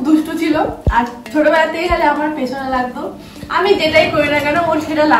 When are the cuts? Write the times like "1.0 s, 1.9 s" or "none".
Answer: none